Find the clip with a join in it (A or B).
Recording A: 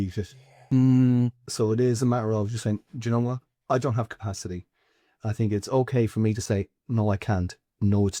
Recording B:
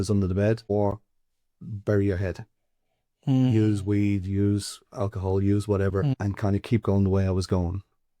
B